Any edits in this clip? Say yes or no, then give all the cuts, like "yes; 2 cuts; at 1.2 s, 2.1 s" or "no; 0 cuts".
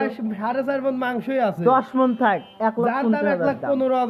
no; 0 cuts